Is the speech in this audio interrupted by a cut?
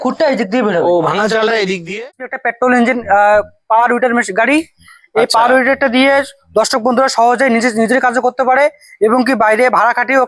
yes; 1 cut; at 2.2 s

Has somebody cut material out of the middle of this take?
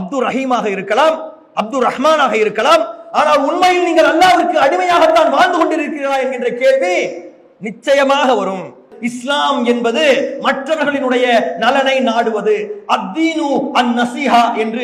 yes; 1 cut; at 8.9 s

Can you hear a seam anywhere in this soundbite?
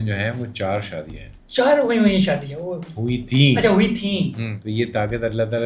yes; 1 cut; at 4.5 s

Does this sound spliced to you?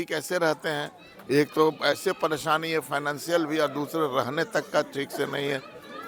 no; 0 cuts

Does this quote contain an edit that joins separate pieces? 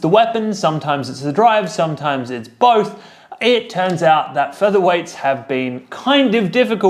yes; 1 cut; at 4.9 s

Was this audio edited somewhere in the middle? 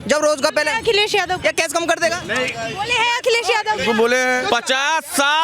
yes; 2 cuts; at 2.2 s, 4.4 s

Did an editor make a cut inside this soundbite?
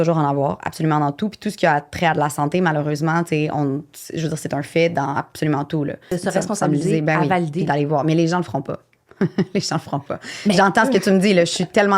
yes; 1 cut; at 6.1 s

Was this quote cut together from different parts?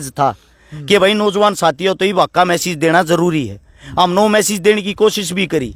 no; 0 cuts

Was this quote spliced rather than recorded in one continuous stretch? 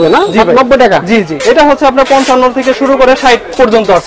yes; 1 cut; at 1.3 s

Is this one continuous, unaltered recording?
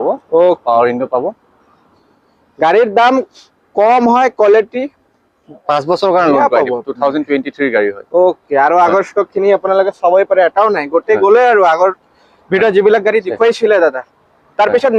yes; 0 cuts

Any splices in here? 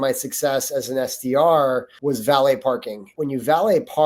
yes; 2 cuts; at 1.9 s, 3.0 s

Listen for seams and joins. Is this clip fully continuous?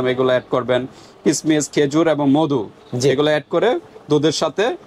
yes; 0 cuts

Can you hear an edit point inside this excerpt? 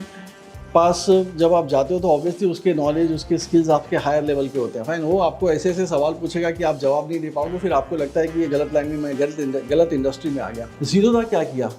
yes; 1 cut; at 10.7 s

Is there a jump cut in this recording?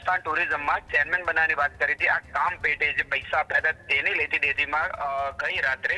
no; 0 cuts

